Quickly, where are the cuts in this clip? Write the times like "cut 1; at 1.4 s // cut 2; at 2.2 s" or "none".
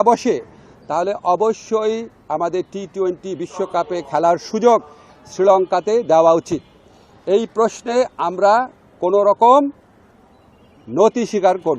none